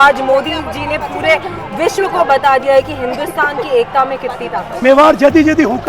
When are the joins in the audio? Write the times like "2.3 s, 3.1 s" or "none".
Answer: 4.8 s